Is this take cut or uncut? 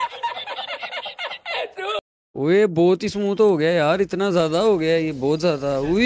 cut